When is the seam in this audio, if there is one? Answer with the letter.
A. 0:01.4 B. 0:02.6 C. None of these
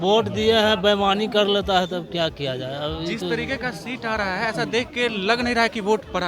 C